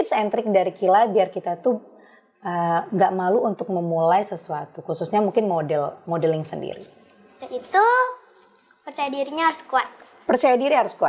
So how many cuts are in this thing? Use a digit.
0